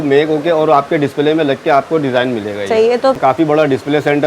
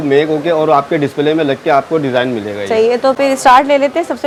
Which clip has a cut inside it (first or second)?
first